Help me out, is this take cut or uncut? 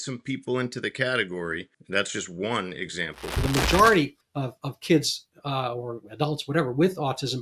cut